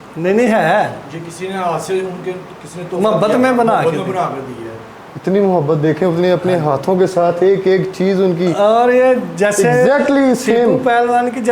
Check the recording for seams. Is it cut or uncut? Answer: uncut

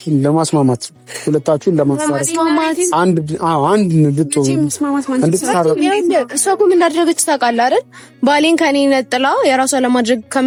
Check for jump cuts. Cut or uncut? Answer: uncut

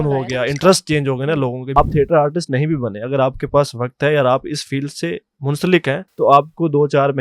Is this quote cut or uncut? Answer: cut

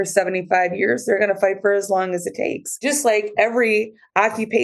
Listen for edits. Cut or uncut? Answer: cut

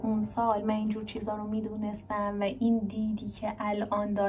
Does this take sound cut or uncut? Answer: uncut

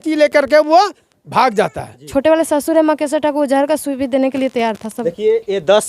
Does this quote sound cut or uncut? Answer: cut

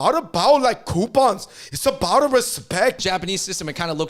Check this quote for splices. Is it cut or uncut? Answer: cut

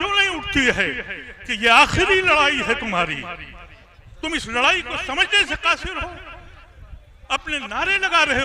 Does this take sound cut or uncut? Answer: uncut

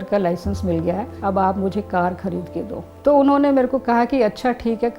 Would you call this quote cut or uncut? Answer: cut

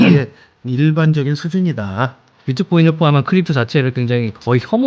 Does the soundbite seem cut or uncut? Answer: cut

